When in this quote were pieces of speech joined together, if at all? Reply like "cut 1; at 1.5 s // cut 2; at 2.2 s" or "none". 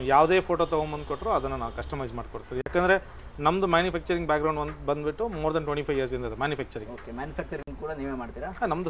none